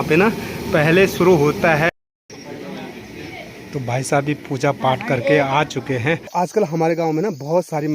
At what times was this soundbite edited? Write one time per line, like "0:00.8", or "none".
0:01.9
0:06.3

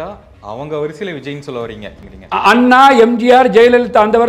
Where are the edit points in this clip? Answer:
0:02.0

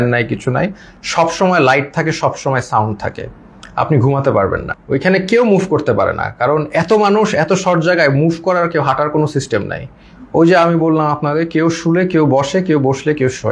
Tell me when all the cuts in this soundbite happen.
0:04.7

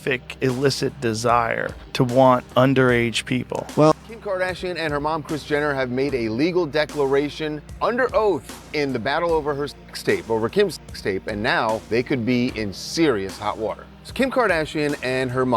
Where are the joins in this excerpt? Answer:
0:03.9

